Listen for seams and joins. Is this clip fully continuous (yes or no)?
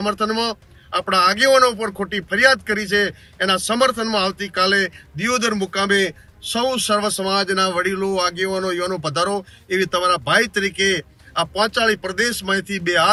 yes